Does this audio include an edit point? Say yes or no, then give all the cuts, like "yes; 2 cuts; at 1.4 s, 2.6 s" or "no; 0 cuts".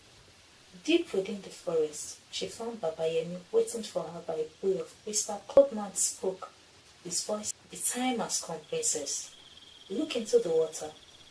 yes; 2 cuts; at 5.6 s, 7.5 s